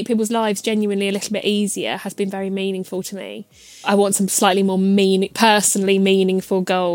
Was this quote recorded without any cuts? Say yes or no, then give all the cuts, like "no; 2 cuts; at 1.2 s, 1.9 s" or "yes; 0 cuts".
no; 1 cut; at 3.8 s